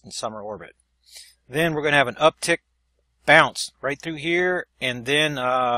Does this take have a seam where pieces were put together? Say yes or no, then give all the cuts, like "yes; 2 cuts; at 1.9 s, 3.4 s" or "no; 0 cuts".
no; 0 cuts